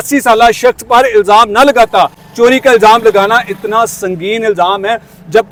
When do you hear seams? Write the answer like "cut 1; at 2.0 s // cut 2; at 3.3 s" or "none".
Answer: none

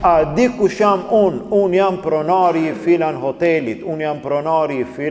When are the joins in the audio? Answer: none

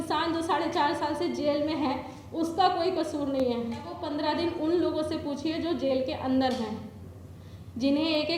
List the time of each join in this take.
cut 1; at 4.0 s

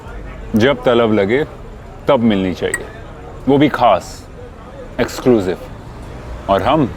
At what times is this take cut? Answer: none

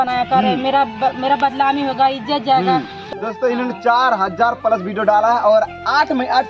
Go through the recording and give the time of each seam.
cut 1; at 3.0 s

